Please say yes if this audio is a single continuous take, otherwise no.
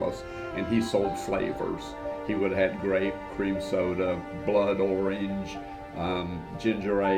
yes